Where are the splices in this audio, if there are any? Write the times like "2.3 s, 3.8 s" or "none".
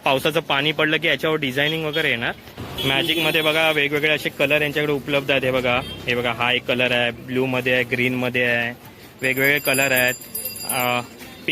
2.7 s